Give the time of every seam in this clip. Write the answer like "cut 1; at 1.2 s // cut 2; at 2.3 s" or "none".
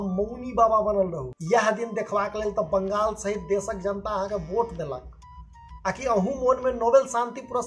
cut 1; at 1.3 s